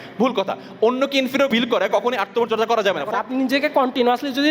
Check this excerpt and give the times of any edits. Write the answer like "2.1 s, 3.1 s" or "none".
1.5 s, 3.2 s